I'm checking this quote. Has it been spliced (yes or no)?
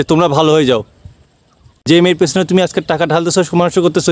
yes